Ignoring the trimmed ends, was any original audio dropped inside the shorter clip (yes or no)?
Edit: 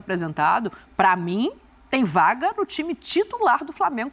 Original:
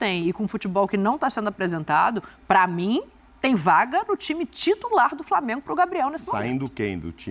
no